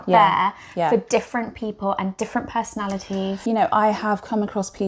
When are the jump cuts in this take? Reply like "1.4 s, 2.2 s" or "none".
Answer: 3.4 s